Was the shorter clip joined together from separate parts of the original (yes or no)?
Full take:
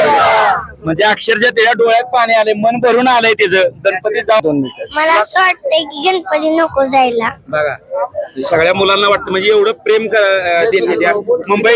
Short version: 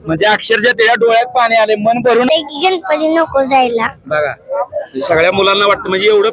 yes